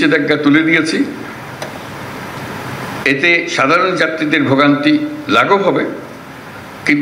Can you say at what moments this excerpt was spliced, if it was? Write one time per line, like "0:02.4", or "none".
none